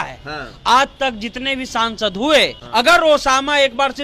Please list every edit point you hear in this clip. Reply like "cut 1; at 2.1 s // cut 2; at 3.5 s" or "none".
cut 1; at 2.6 s